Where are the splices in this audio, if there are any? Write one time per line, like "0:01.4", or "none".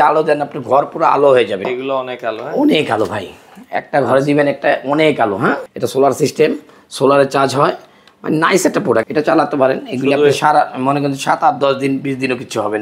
0:01.6
0:05.7
0:09.0